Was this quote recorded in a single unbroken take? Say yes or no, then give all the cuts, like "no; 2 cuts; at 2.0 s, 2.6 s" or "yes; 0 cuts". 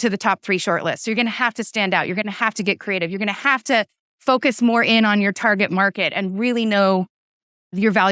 yes; 0 cuts